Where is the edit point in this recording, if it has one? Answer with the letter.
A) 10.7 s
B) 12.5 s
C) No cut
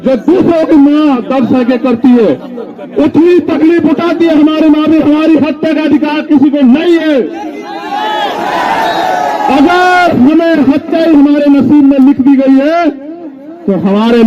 C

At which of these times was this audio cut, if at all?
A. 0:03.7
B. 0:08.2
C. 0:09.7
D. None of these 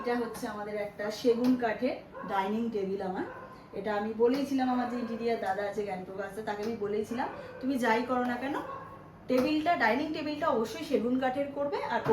D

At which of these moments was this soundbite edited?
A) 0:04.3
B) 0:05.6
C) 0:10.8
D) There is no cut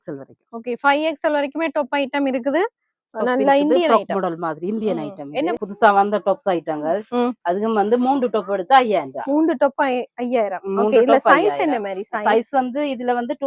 B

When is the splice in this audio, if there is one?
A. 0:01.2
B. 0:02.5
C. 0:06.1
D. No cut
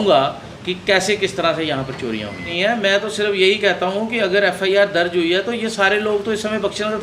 B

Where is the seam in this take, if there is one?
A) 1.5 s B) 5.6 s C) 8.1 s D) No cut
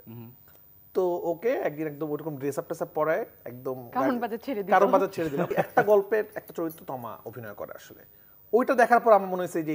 B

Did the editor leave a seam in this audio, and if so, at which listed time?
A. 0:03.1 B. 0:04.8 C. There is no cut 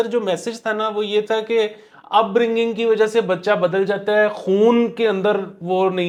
C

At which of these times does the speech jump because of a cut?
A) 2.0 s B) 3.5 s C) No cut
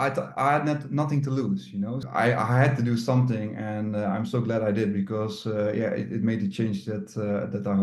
A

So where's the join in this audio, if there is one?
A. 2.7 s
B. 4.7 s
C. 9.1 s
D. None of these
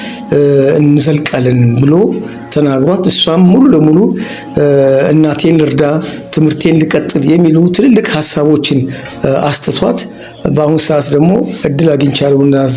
D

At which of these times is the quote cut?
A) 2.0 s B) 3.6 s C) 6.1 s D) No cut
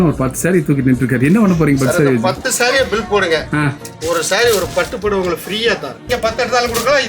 C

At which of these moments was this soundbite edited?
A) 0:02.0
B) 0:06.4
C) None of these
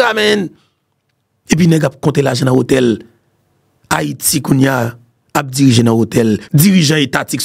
B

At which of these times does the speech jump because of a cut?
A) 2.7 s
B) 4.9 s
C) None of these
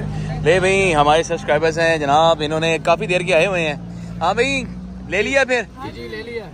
C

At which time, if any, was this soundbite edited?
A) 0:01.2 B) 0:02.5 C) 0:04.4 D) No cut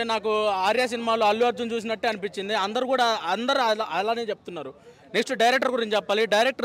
D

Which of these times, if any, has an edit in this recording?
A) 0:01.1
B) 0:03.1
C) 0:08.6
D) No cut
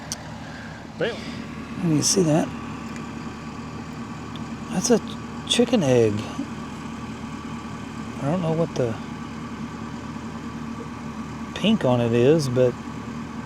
A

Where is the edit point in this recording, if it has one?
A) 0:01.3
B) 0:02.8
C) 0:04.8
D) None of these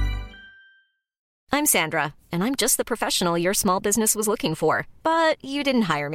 A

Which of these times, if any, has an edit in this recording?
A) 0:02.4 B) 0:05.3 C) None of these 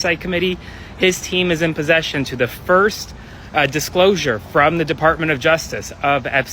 C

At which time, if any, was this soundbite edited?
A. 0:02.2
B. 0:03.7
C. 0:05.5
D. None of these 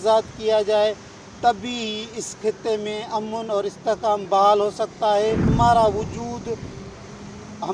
C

